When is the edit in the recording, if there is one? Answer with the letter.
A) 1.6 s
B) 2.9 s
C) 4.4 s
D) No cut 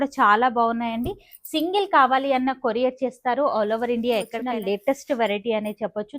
C